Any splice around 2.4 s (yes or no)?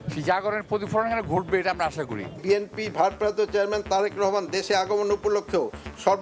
yes